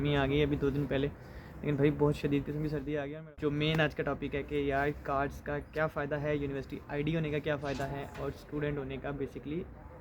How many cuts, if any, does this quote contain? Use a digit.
1